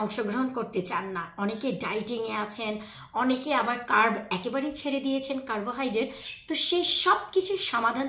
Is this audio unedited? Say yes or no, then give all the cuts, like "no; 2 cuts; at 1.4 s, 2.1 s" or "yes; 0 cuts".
yes; 0 cuts